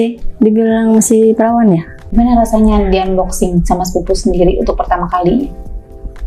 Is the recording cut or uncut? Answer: cut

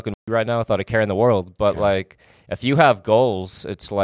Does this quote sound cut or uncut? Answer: uncut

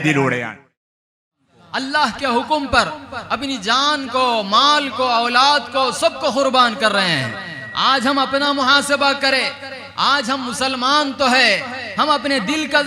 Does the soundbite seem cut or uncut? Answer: cut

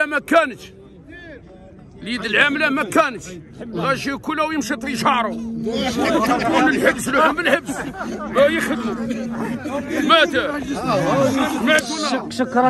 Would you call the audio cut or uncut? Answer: uncut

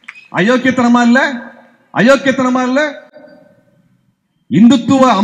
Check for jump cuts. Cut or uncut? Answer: uncut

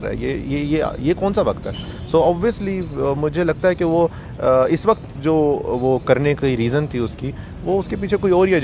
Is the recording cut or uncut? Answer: uncut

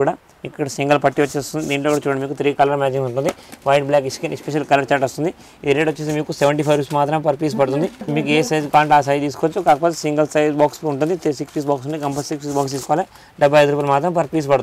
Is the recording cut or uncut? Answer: uncut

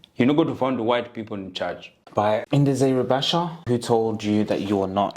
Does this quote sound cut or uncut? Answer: cut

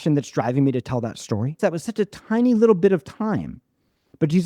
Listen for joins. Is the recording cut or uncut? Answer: cut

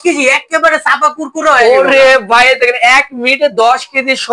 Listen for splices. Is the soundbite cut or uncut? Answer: uncut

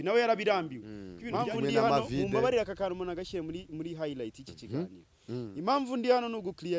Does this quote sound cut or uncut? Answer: cut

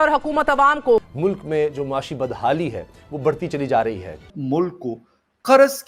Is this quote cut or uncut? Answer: cut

